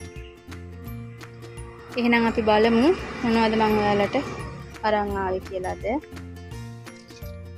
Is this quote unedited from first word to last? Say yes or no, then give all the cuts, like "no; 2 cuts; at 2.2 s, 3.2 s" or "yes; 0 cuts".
no; 2 cuts; at 1.9 s, 6.0 s